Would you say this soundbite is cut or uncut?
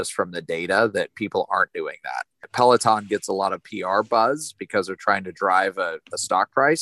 cut